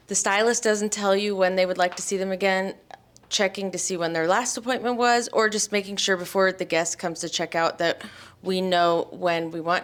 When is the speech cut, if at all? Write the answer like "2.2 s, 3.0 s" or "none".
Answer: none

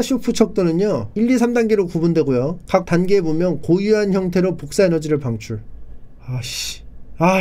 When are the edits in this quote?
1.1 s

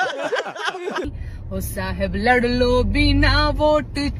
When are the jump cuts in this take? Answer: 1.0 s

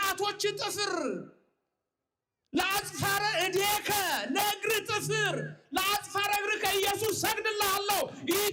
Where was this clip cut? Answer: none

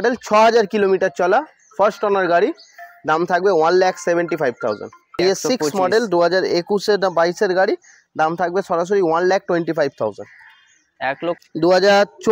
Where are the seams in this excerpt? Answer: 5.1 s, 11.4 s

